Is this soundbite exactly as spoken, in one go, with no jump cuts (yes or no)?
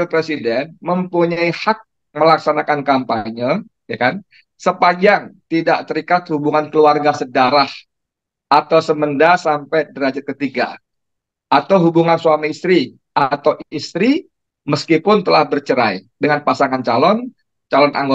yes